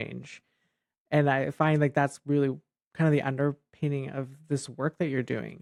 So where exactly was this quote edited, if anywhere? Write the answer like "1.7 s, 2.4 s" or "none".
none